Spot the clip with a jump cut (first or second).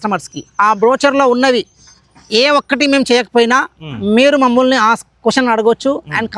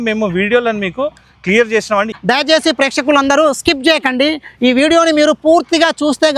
second